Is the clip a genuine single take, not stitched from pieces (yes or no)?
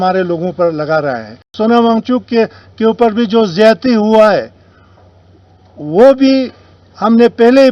no